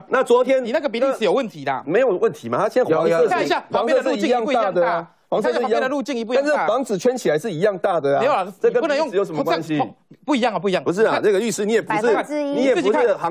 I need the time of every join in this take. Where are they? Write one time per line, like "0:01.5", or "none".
none